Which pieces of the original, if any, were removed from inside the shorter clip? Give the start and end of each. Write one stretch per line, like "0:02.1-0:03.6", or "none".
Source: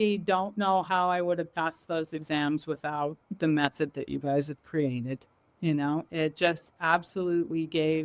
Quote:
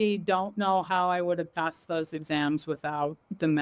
none